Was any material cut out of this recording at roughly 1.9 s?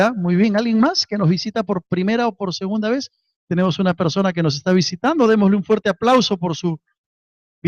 no; 0 cuts

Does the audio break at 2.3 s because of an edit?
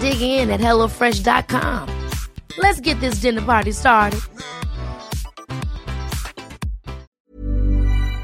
no; 1 cut; at 7.1 s

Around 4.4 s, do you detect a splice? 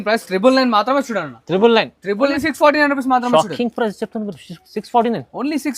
no; 1 cut; at 2.3 s

